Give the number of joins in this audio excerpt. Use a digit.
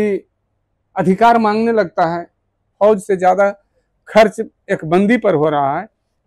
1